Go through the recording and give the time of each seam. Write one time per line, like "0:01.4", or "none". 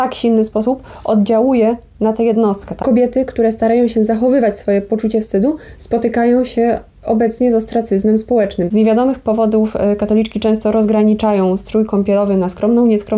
0:02.7
0:08.7